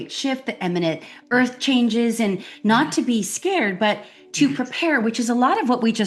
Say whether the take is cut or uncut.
uncut